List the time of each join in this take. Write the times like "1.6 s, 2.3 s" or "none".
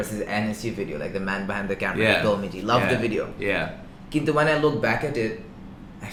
none